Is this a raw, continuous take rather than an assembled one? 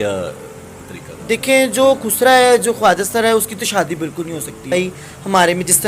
no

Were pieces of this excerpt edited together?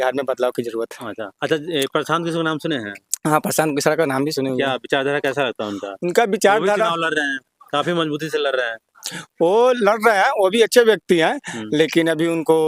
no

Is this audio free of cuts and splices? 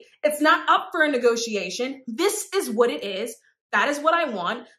yes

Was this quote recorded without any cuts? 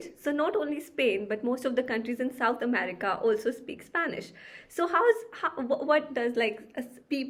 yes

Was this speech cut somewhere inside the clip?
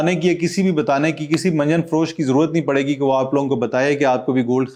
no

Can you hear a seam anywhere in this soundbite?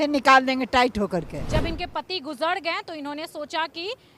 yes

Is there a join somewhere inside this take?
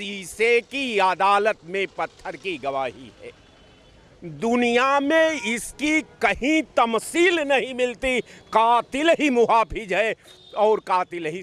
no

